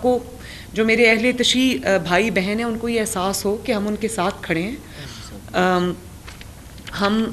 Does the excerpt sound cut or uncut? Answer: uncut